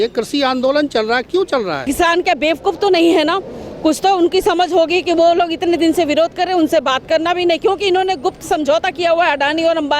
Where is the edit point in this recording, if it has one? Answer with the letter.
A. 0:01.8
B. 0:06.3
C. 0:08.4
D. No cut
A